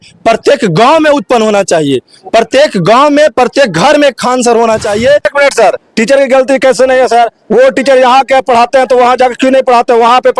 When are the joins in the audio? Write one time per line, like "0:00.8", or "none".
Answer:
0:05.3